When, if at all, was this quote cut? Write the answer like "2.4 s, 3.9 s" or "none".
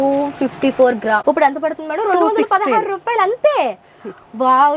1.2 s